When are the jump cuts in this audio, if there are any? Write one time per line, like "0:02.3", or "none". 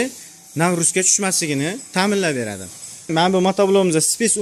0:03.1

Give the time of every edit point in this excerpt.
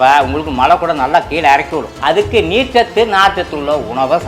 0:01.9

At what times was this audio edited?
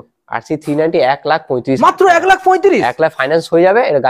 none

